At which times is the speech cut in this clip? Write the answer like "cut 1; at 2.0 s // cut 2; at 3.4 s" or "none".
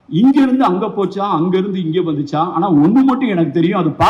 none